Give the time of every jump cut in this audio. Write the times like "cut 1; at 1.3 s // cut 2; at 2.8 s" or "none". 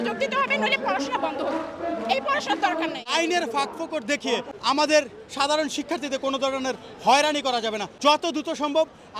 cut 1; at 3.1 s // cut 2; at 4.5 s // cut 3; at 7.9 s